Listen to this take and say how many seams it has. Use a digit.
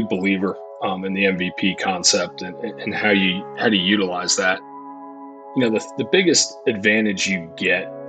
1